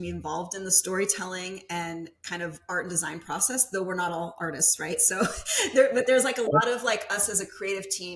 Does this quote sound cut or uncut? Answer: uncut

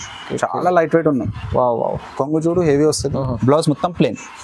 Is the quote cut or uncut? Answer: uncut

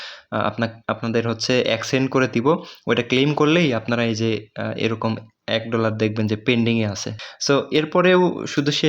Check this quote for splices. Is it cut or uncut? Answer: cut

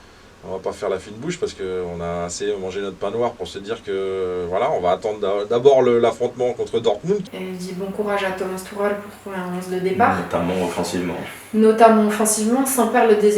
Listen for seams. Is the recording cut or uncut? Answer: cut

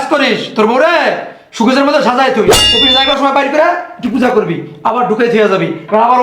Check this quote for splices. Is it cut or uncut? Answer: cut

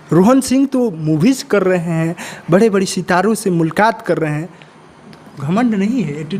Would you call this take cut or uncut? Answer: uncut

